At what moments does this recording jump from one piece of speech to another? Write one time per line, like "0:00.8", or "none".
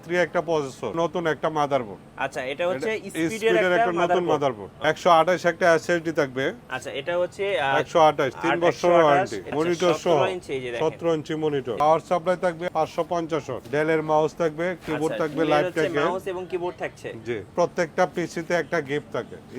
0:00.9
0:04.7
0:09.5
0:11.8
0:12.6
0:13.6
0:17.5

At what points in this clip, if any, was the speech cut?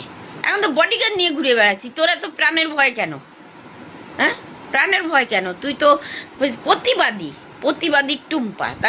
none

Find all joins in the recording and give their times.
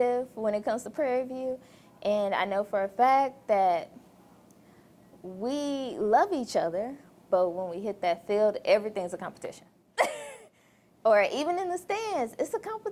none

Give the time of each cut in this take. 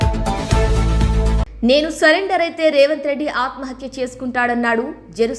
0:01.5

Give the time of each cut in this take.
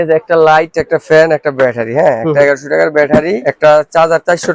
0:03.4

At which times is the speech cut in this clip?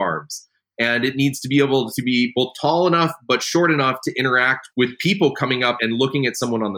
0:05.8

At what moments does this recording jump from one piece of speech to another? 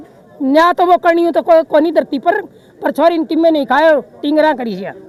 none

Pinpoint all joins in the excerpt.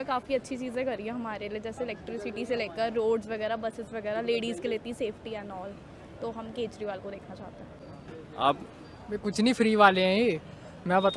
0:07.8

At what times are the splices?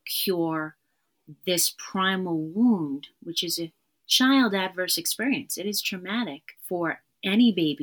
0:06.5

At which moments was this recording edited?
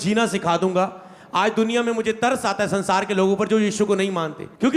none

